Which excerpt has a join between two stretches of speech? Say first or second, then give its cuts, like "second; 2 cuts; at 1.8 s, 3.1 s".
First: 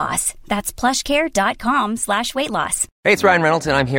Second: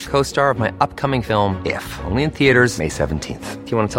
first; 1 cut; at 2.8 s